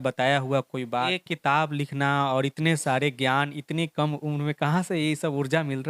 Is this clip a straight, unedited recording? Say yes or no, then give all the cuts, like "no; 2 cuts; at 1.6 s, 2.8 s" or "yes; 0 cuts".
no; 1 cut; at 1.1 s